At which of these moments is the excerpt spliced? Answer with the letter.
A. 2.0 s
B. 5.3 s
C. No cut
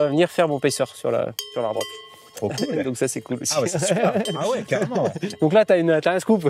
B